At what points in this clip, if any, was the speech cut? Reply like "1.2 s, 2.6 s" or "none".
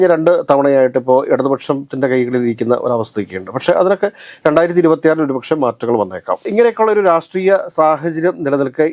6.4 s